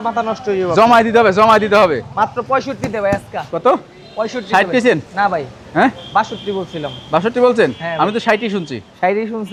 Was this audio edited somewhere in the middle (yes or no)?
no